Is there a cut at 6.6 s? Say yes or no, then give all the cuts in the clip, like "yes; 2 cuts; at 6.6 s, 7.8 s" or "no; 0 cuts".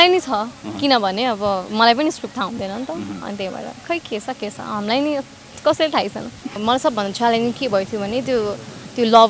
yes; 1 cut; at 6.6 s